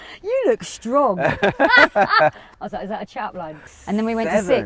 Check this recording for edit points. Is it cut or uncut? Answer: cut